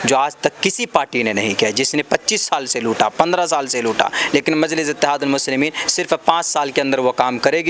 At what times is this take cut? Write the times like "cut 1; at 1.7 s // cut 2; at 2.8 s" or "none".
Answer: none